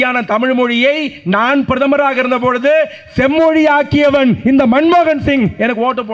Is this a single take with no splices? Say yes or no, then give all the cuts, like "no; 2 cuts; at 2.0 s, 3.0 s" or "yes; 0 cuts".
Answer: yes; 0 cuts